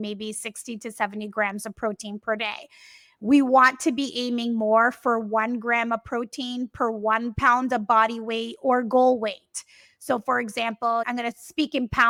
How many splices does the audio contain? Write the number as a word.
zero